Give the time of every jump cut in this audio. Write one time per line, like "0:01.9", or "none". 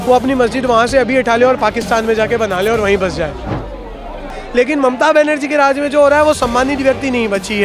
0:04.3